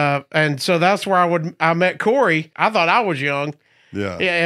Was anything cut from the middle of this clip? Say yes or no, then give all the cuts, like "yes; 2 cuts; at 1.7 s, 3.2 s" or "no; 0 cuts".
yes; 1 cut; at 2.5 s